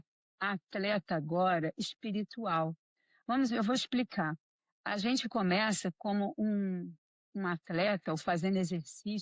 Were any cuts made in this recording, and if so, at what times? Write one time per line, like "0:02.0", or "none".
none